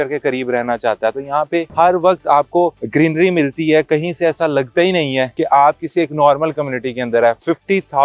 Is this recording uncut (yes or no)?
yes